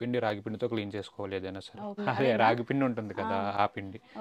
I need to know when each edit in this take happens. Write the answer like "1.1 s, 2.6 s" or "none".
2.0 s